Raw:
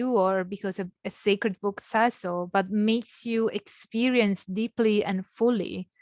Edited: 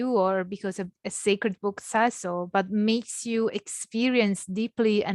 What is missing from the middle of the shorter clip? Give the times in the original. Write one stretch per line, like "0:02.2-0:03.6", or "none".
none